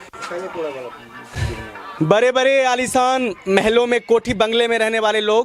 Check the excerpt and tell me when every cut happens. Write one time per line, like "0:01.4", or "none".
none